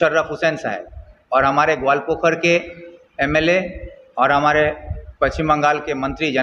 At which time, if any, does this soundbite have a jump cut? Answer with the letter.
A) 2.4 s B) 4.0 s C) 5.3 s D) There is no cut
D